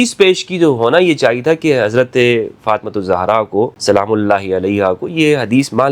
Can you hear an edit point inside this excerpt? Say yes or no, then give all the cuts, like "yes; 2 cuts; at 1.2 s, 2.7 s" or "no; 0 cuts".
yes; 1 cut; at 3.8 s